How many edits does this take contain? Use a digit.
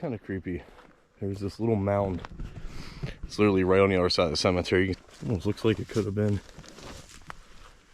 1